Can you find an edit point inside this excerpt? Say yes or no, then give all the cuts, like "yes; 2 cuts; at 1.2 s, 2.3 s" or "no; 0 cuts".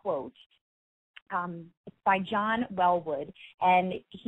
no; 0 cuts